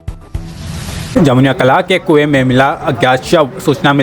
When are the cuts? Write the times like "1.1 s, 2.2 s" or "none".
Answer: 1.1 s